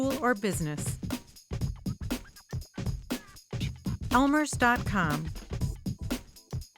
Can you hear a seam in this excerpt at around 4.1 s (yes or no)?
yes